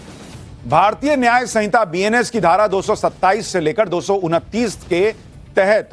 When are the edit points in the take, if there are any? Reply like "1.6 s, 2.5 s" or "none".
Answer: none